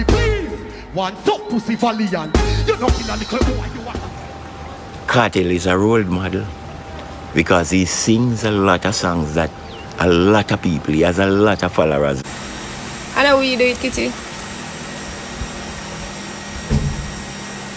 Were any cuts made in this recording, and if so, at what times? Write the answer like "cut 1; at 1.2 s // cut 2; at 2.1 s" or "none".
cut 1; at 3.8 s // cut 2; at 12.2 s

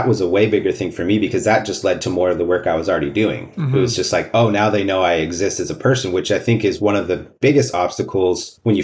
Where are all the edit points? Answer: none

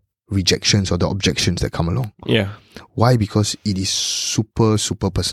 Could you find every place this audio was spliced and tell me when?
none

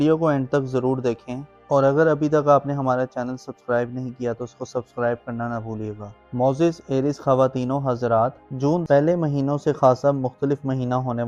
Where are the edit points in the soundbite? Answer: none

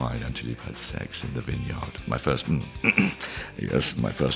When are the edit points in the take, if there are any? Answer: cut 1; at 1.9 s

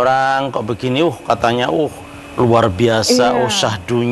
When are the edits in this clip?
none

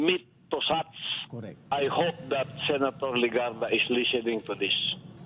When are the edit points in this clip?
cut 1; at 1.6 s

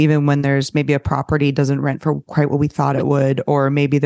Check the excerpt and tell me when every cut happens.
none

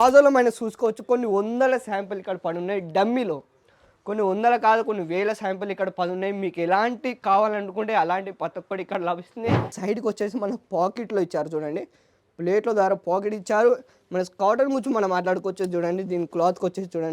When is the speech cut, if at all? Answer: cut 1; at 9.8 s

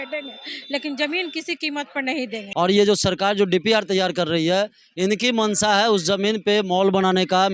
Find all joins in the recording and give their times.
cut 1; at 2.4 s

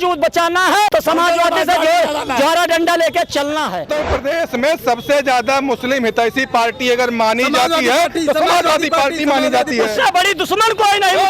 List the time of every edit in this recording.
cut 1; at 0.9 s // cut 2; at 3.9 s

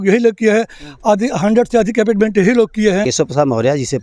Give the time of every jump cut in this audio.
cut 1; at 3.0 s

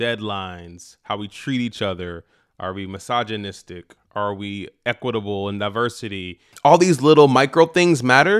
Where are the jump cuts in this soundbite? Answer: cut 1; at 6.5 s

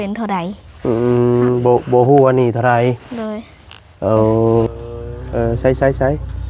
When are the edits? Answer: cut 1; at 4.7 s

